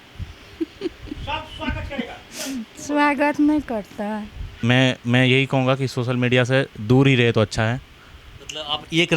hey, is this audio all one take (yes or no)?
no